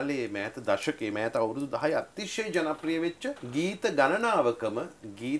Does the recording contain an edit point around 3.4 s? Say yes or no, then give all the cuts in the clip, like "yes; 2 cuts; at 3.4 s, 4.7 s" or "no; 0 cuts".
yes; 1 cut; at 3.4 s